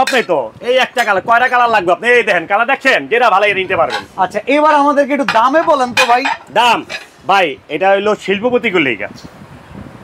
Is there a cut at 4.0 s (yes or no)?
no